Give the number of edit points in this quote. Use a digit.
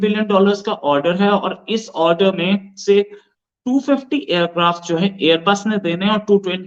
0